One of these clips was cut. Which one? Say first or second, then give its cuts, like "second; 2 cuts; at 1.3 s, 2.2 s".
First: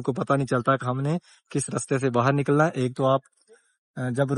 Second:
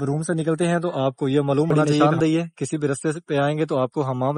second; 1 cut; at 1.9 s